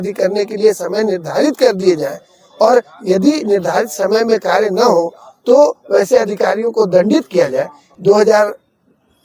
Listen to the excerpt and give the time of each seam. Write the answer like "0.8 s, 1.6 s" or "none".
7.8 s